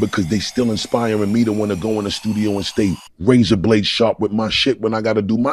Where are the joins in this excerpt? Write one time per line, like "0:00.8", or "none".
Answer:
none

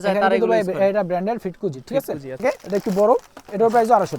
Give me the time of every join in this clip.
0:02.4

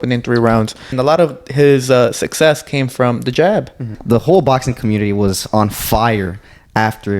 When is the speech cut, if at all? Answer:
0:00.9
0:03.9

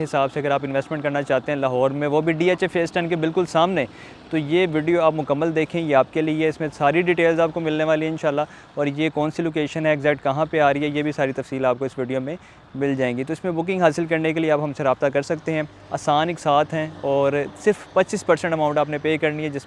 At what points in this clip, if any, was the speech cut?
none

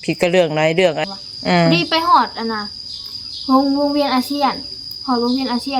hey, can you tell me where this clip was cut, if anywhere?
0:01.0

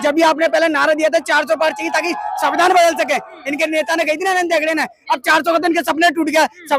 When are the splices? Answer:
none

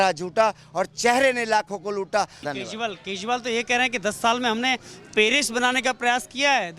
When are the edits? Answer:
0:02.4

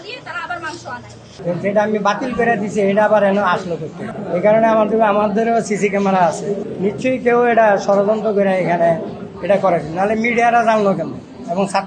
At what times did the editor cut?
0:01.4

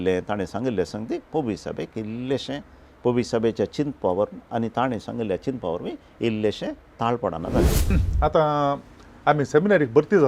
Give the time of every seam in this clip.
0:07.9

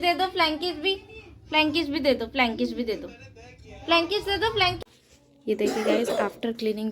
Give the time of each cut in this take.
0:04.8

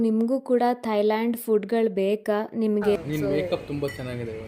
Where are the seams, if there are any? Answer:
0:03.0

